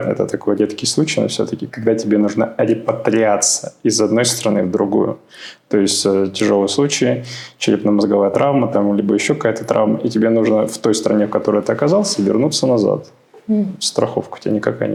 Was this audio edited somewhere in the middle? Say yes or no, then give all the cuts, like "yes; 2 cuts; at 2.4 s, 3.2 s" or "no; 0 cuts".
no; 0 cuts